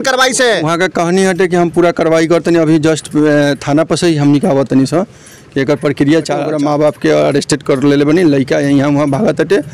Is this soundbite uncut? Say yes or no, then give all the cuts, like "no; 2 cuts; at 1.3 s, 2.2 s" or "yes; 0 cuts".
no; 1 cut; at 6.5 s